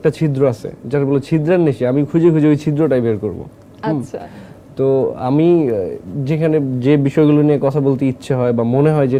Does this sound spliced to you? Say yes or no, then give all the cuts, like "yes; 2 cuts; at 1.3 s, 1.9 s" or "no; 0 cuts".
no; 0 cuts